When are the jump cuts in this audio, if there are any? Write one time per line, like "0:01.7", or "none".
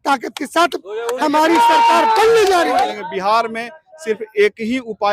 0:02.9